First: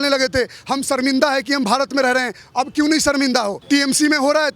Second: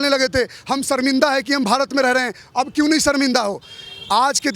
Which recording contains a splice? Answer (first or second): first